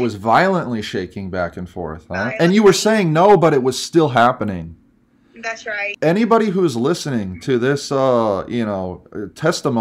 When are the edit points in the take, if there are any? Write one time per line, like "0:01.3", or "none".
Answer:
0:05.9